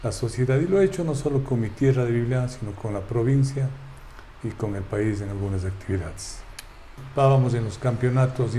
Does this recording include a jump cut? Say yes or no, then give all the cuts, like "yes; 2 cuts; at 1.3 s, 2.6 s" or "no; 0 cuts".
yes; 1 cut; at 7.0 s